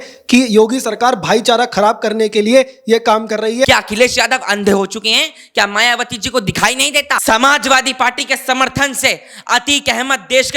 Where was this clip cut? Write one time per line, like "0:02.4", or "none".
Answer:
0:03.7
0:07.2